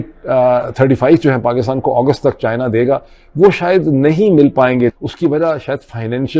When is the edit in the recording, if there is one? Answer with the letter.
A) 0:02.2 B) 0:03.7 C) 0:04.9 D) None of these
C